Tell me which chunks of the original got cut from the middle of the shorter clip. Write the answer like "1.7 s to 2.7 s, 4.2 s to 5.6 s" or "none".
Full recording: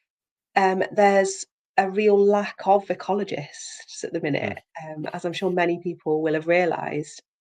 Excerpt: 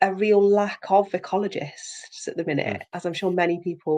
4.7 s to 5.1 s